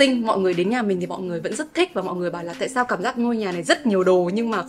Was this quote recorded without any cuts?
yes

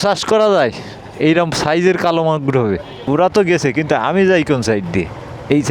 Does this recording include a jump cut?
yes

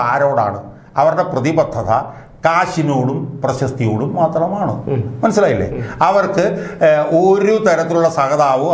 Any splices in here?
no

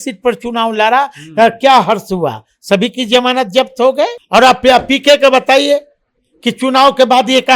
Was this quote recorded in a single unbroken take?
no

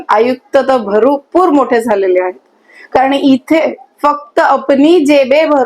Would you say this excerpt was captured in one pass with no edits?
yes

